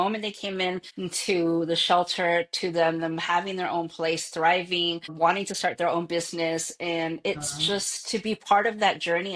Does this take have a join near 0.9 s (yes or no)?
yes